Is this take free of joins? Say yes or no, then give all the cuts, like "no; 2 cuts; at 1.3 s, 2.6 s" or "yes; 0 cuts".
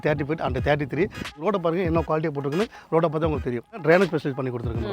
no; 2 cuts; at 1.4 s, 3.8 s